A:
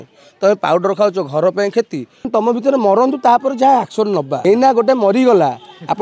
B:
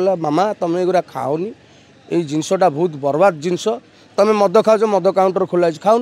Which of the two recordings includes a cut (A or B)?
A